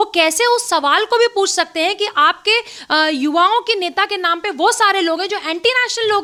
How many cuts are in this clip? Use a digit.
0